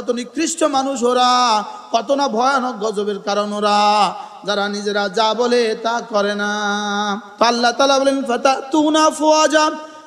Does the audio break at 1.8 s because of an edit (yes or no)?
no